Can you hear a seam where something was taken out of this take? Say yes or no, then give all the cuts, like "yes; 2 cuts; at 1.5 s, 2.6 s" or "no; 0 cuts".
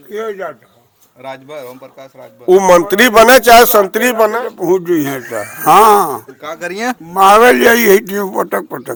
no; 0 cuts